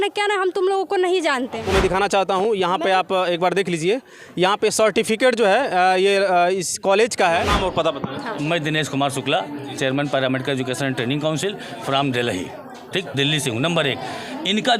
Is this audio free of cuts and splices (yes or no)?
no